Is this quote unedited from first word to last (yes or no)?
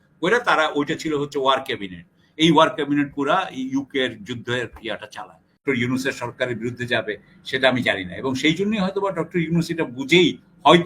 no